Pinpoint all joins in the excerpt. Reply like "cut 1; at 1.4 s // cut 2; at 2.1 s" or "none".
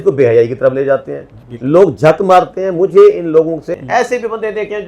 cut 1; at 3.7 s